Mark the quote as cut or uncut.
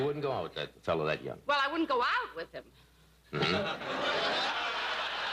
uncut